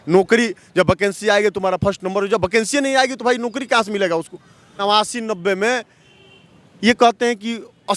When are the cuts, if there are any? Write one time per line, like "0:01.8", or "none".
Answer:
0:04.8